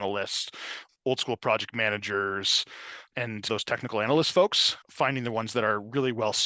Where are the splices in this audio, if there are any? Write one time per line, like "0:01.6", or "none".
none